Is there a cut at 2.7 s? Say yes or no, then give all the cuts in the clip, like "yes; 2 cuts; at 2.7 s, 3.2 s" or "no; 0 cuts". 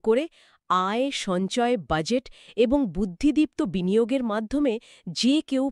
no; 0 cuts